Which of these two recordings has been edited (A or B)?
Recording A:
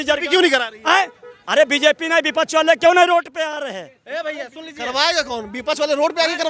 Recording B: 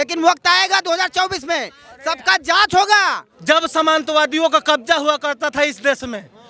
B